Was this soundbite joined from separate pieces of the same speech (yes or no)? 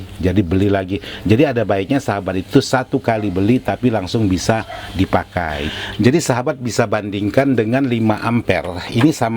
yes